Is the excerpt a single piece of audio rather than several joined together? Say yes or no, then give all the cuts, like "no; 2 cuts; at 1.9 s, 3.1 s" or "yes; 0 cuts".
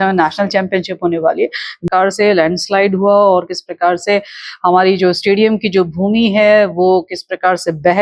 no; 1 cut; at 1.8 s